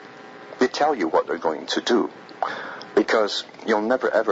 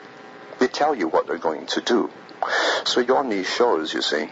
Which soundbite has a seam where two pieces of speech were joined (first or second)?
second